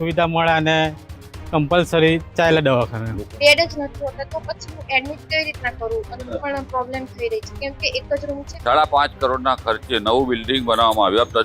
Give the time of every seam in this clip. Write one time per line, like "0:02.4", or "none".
0:03.2
0:06.1
0:08.4